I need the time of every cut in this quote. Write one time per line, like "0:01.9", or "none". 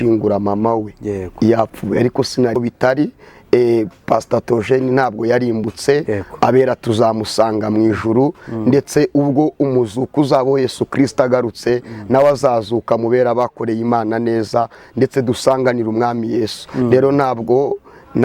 0:02.6